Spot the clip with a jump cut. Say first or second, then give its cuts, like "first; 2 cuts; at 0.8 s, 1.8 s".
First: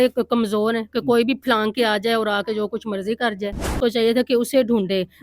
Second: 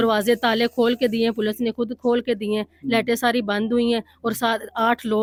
first; 1 cut; at 3.8 s